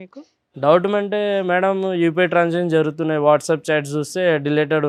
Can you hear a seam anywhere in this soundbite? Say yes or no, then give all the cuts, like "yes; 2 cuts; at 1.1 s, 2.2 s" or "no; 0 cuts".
no; 0 cuts